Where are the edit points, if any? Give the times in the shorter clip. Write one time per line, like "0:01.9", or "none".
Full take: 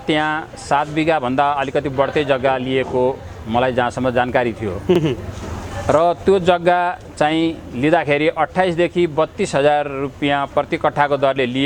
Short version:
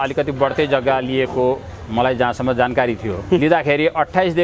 0:03.4